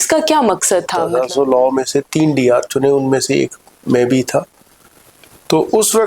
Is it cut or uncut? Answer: cut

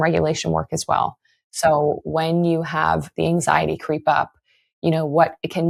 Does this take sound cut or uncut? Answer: uncut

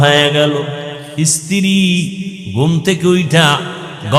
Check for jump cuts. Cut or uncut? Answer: cut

